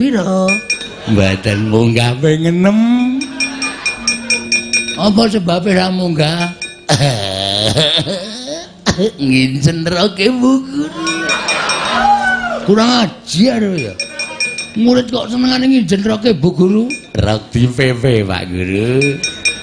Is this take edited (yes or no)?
yes